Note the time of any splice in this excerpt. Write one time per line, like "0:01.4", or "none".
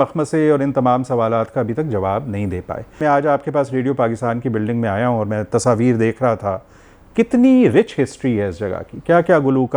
0:02.9